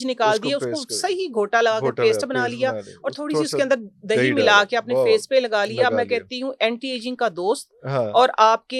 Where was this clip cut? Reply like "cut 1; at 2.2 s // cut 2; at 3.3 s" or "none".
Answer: none